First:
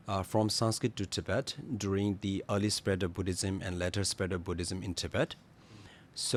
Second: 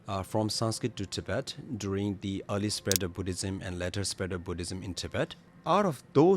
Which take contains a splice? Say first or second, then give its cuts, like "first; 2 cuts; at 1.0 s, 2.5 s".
second; 1 cut; at 5.5 s